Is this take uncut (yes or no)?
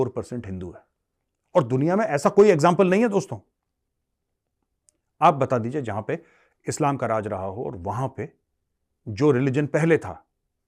yes